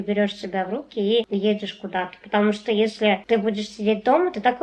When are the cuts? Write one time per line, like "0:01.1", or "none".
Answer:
0:01.3
0:03.2